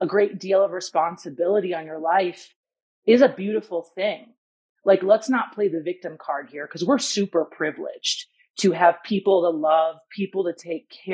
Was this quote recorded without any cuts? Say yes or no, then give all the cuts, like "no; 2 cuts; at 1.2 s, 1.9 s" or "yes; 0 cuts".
no; 1 cut; at 4.5 s